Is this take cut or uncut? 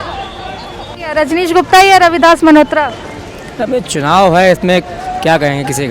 cut